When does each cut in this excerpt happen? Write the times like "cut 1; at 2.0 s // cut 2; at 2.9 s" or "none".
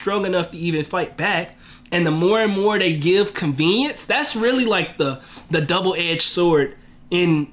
none